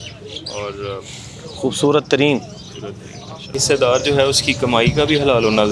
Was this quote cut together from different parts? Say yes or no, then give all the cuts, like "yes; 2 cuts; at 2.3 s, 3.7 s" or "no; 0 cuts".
yes; 1 cut; at 3.5 s